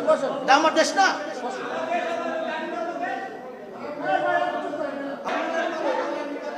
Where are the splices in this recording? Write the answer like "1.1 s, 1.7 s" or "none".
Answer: 5.3 s